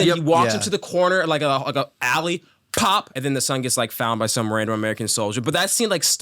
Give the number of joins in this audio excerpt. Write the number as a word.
one